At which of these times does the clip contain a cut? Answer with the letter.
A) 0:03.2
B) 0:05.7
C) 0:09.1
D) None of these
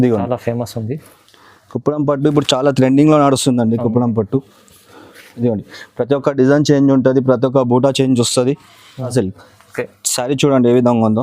C